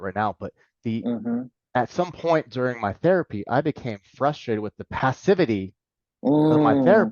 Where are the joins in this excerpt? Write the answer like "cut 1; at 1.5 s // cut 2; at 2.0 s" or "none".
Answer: none